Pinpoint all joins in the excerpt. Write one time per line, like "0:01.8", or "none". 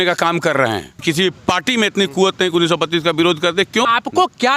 0:01.0
0:03.8